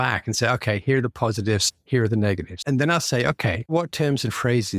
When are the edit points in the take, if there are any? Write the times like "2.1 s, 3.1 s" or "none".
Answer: 2.6 s, 3.7 s